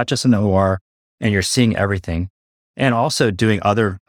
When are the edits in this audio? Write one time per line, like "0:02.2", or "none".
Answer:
none